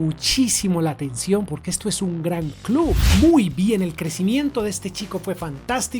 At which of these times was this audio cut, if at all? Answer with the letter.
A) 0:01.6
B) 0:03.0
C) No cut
B